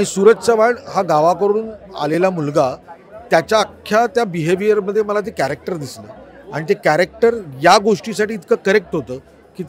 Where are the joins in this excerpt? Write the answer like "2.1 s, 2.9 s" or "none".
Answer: none